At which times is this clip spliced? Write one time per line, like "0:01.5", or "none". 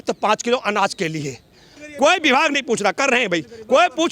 0:01.7